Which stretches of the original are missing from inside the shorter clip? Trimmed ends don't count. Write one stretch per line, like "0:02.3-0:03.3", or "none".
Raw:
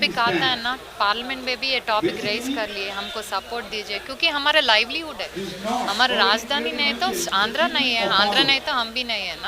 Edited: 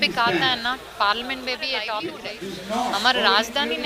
0:02.3-0:05.2